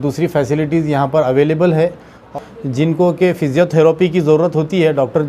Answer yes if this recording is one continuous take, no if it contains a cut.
no